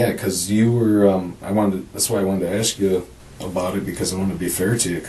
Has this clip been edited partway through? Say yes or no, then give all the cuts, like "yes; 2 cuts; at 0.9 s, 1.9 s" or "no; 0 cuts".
no; 0 cuts